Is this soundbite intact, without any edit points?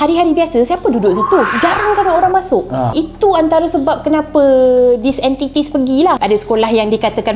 no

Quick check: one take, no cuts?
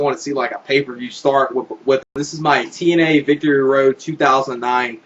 yes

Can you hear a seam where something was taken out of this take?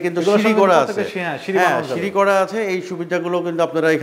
no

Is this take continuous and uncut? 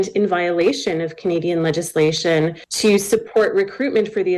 no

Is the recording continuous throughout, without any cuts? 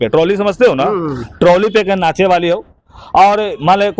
yes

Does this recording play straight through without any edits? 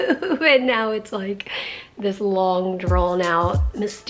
yes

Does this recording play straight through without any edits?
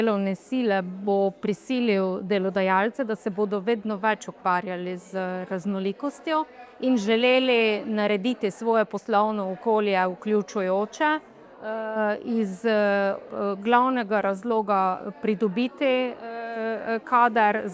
yes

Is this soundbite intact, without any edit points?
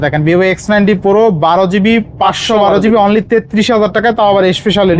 yes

